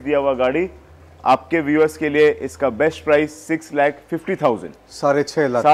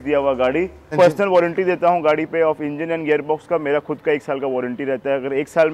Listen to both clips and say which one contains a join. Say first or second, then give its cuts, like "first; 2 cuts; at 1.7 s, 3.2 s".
second; 1 cut; at 0.9 s